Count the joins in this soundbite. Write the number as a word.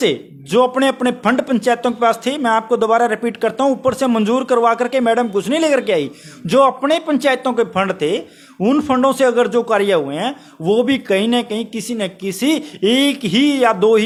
zero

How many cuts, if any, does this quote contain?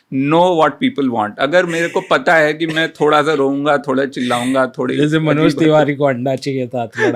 zero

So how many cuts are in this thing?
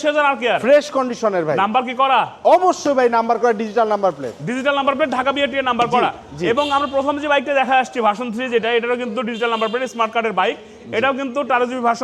zero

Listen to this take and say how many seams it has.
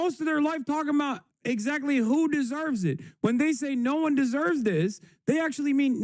one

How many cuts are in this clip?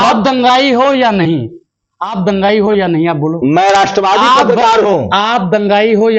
zero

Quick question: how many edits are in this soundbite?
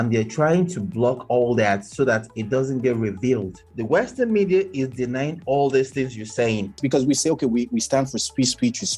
two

